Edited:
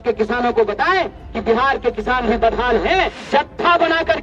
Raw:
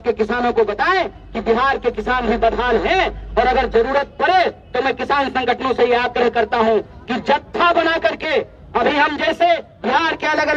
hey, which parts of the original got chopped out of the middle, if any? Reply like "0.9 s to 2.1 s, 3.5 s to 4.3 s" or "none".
3.2 s to 7.1 s